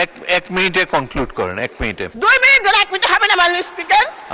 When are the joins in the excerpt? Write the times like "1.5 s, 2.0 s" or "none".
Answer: 2.1 s